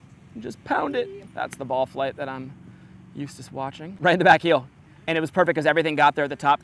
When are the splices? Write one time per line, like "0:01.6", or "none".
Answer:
0:01.2
0:04.0